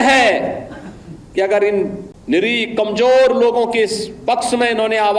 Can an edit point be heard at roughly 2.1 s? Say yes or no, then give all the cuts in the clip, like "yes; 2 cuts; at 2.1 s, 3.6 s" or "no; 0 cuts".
yes; 1 cut; at 2.1 s